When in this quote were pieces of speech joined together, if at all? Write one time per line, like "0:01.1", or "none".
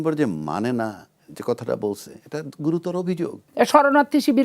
0:03.4